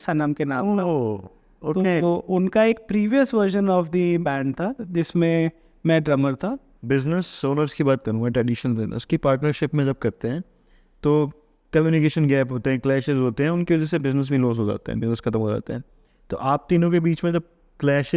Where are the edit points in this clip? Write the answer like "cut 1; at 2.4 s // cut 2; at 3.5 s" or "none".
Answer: cut 1; at 6.7 s

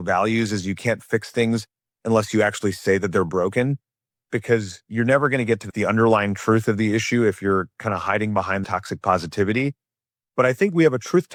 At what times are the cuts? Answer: none

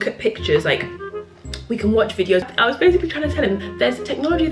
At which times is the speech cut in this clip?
cut 1; at 2.5 s

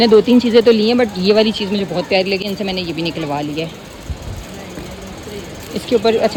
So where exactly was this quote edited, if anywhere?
none

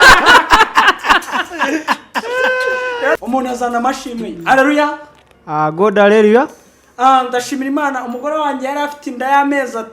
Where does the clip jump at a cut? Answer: cut 1; at 3.2 s

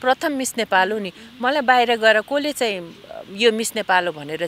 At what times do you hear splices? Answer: none

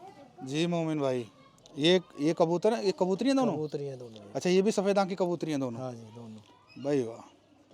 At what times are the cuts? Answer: none

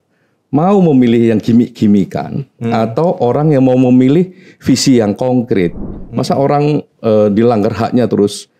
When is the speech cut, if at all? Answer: cut 1; at 5.8 s

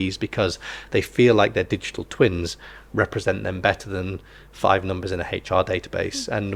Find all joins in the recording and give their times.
none

